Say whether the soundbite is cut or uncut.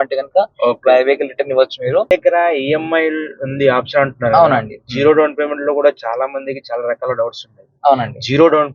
cut